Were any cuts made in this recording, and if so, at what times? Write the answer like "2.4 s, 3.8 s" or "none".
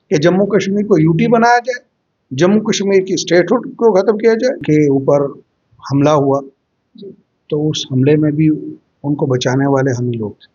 4.6 s